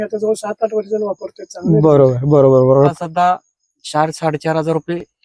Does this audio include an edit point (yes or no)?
yes